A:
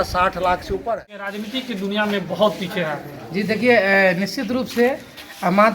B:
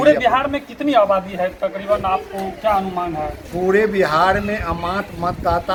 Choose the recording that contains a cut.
A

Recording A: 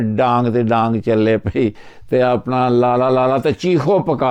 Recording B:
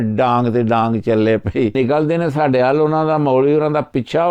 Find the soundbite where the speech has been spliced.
B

